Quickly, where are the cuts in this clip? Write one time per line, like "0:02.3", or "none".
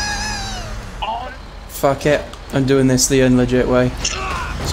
0:01.3